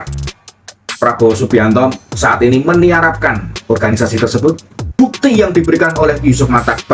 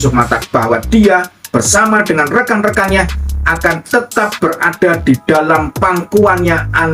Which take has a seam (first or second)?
first